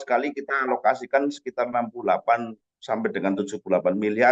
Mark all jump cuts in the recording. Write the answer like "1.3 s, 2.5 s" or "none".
none